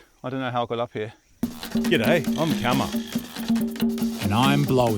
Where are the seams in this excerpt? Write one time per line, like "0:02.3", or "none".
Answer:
0:01.5